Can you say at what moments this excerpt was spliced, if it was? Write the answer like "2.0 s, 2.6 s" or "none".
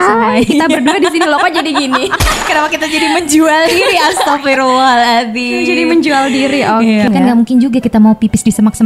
7.1 s